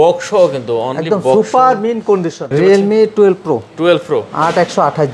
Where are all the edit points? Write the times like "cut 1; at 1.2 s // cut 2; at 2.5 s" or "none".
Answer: cut 1; at 2.5 s